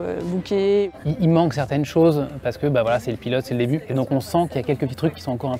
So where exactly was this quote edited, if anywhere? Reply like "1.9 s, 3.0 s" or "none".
0.9 s, 3.9 s